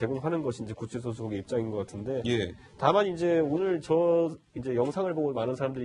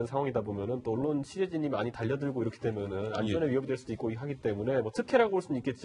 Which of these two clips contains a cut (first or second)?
second